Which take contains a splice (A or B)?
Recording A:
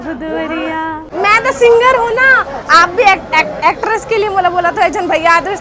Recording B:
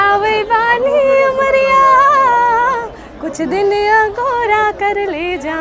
A